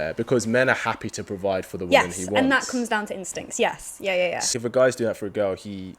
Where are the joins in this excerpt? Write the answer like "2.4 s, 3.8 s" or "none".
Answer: 4.5 s

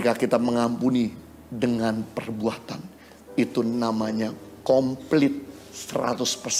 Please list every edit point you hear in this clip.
none

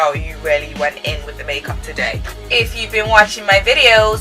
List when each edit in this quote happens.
2.3 s

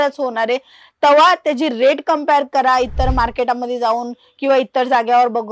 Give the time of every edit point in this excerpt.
none

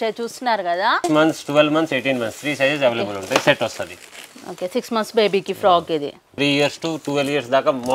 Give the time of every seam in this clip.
1.0 s, 6.3 s

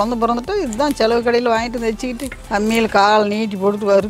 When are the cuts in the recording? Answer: 2.4 s

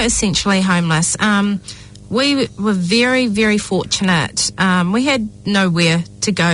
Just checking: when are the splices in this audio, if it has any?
none

